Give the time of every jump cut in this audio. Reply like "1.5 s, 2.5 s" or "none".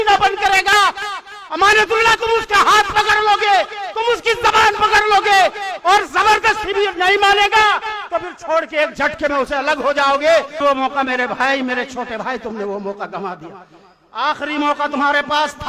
10.6 s